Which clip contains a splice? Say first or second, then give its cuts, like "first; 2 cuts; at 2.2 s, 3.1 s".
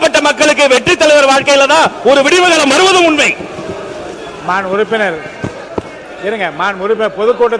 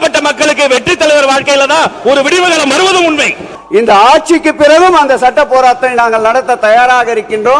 second; 1 cut; at 3.5 s